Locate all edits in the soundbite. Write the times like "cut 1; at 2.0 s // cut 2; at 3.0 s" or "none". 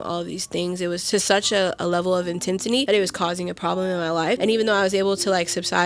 cut 1; at 1.0 s // cut 2; at 2.8 s // cut 3; at 4.4 s